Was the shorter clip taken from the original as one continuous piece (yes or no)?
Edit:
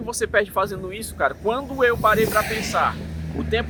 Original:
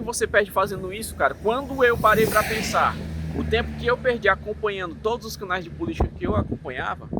yes